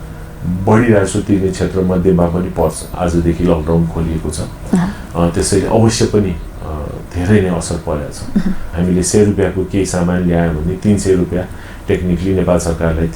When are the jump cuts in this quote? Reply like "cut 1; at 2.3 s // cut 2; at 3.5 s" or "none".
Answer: cut 1; at 2.9 s // cut 2; at 8.7 s